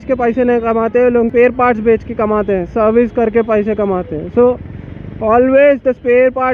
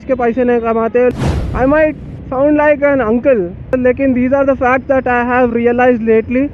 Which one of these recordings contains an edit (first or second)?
second